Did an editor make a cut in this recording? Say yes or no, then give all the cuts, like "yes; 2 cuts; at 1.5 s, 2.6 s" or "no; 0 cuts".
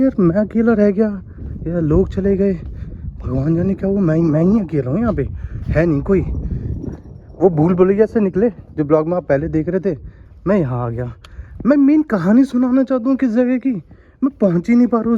no; 0 cuts